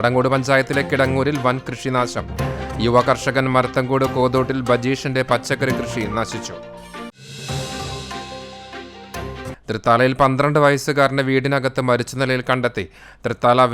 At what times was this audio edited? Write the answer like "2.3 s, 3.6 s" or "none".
none